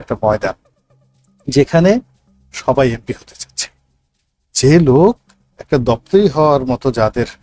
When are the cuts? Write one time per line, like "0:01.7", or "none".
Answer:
none